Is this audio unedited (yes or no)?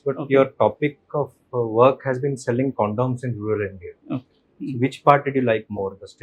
yes